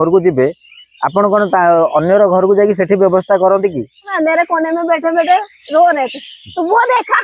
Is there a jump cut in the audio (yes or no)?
yes